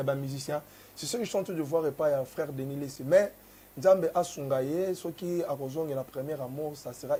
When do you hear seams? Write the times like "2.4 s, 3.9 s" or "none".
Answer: none